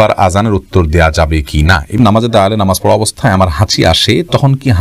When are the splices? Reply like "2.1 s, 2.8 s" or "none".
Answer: 2.0 s